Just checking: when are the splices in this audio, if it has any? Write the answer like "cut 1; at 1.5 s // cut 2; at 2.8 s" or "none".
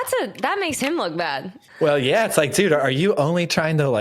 cut 1; at 1.6 s